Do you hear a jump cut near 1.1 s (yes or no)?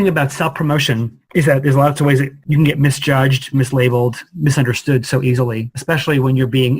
yes